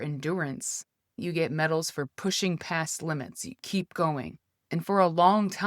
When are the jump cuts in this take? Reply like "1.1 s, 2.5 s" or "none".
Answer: 1.1 s